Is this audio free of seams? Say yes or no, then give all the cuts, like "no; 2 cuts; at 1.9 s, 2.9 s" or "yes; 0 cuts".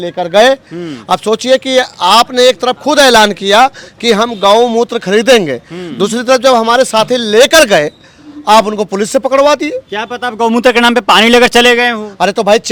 yes; 0 cuts